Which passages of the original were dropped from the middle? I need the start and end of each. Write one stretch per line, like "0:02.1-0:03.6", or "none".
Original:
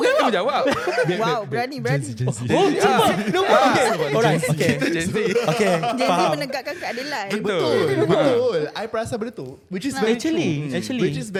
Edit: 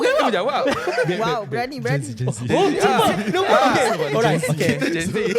none